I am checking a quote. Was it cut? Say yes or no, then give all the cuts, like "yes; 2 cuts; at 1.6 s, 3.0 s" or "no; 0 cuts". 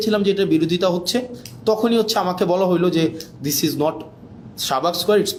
no; 0 cuts